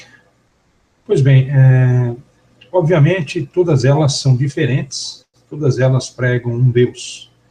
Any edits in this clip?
yes; 1 cut; at 3.9 s

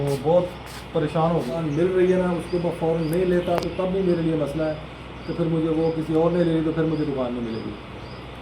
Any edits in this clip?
yes; 1 cut; at 1.5 s

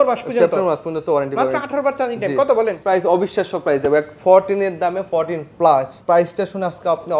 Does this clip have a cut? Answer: yes; 2 cuts; at 2.8 s, 6.0 s

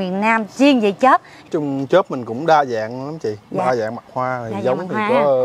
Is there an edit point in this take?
yes; 1 cut; at 1.4 s

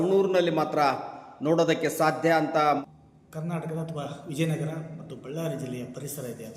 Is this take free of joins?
no; 1 cut; at 2.8 s

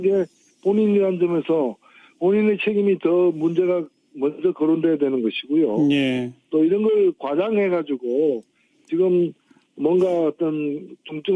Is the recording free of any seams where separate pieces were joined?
no; 1 cut; at 2.5 s

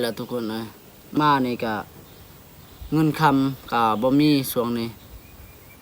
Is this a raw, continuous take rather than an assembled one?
no; 1 cut; at 1.2 s

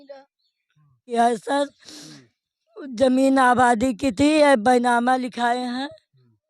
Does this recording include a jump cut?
yes; 1 cut; at 1.1 s

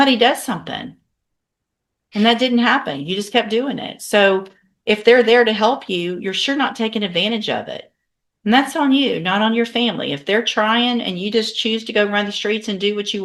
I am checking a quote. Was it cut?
no; 0 cuts

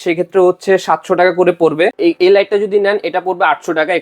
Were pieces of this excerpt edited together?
yes; 1 cut; at 1.9 s

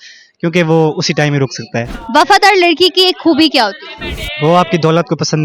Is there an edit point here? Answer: yes; 1 cut; at 2.0 s

